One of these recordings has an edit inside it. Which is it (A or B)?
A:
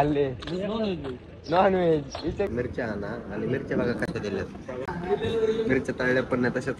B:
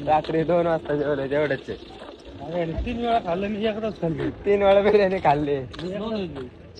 A